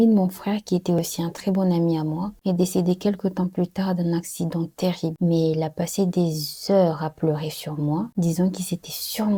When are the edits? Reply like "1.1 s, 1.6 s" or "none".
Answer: none